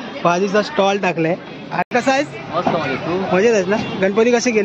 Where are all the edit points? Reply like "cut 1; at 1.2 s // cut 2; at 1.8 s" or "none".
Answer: cut 1; at 1.9 s